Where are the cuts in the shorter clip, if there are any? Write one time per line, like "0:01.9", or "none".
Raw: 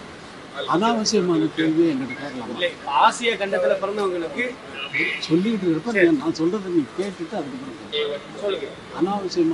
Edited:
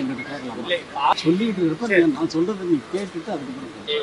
0:01.1